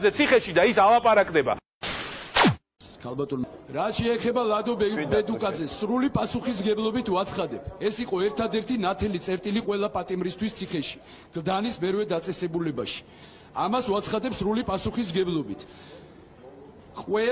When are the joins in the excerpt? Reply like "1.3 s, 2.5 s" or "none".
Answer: 2.7 s